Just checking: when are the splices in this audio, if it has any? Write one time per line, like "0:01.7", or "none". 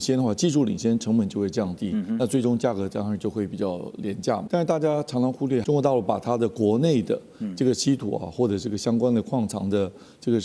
0:04.4
0:05.6